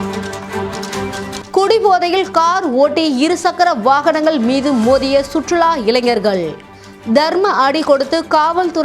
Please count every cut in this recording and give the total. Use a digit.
1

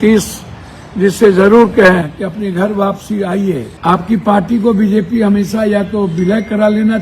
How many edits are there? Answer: 1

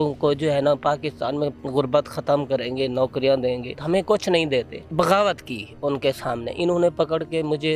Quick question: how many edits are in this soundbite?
3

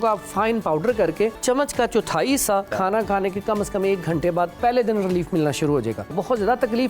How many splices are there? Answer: 4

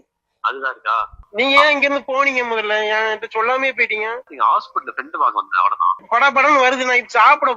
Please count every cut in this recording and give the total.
3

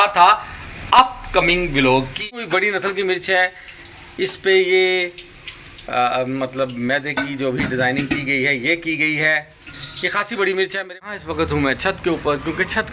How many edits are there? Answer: 2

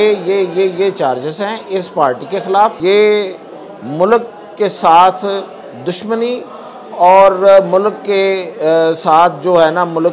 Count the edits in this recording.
1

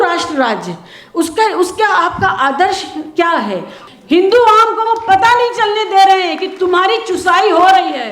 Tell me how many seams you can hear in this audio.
1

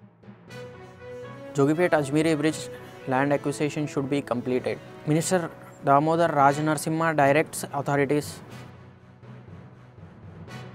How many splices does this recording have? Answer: 1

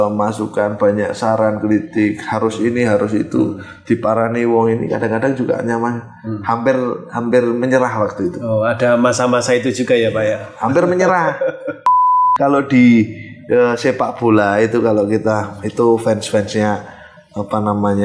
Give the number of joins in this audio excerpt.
1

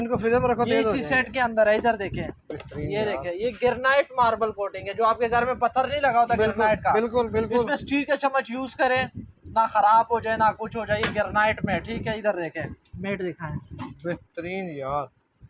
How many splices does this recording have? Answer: 0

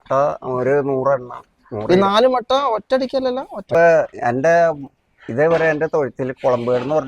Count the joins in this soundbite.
1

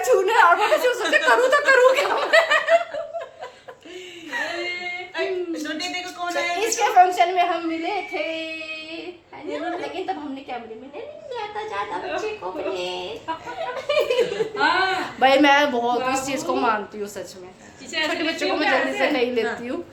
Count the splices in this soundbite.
0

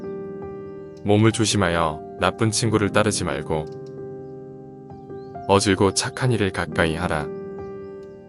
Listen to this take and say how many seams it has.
0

